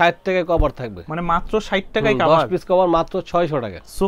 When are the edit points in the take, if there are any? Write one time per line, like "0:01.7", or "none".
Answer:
none